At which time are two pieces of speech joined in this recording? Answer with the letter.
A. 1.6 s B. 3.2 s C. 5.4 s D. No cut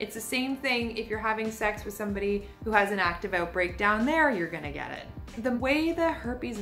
C